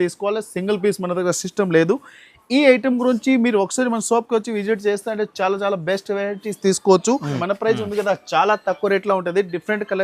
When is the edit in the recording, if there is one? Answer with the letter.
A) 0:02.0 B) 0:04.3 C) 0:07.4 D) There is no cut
C